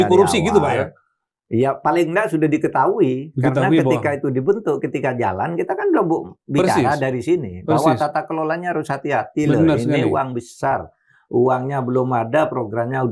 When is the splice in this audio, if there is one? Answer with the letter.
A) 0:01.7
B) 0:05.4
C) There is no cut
C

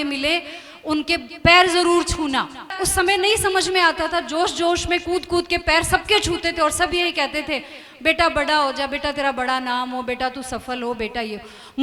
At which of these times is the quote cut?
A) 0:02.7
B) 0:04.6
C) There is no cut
A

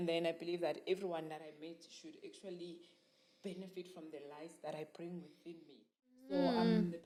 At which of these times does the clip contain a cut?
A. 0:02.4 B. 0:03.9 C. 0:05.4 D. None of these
D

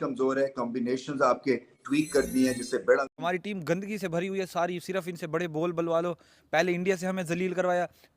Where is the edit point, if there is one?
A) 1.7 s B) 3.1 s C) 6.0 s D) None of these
B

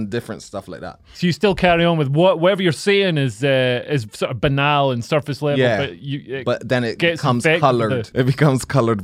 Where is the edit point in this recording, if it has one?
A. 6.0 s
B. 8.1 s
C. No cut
B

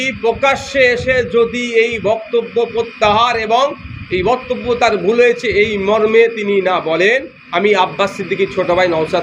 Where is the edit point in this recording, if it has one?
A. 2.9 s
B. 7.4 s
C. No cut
B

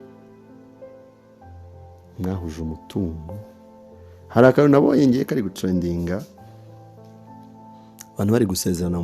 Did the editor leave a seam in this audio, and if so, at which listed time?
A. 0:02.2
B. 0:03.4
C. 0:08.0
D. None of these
A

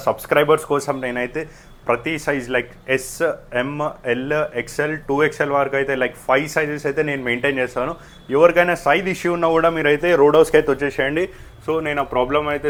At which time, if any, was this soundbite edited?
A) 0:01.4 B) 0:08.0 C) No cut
C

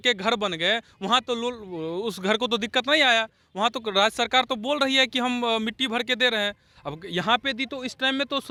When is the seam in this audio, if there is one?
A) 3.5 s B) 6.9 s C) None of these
C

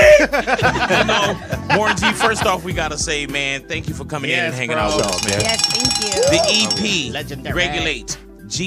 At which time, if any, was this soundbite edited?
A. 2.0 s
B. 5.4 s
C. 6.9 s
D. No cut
A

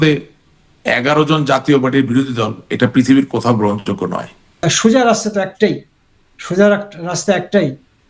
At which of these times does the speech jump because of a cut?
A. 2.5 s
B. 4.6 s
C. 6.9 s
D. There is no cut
B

